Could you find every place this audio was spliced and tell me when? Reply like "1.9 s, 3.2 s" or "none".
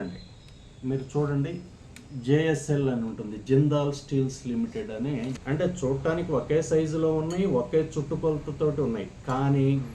5.4 s